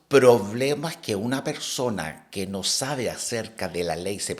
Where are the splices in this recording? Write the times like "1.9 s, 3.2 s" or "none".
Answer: none